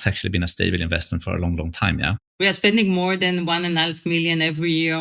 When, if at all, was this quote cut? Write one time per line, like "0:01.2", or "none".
0:01.2
0:02.2

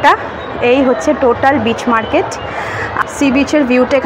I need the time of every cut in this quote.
0:03.0

